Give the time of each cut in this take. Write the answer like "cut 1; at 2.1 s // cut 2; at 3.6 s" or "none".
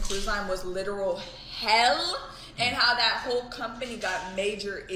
none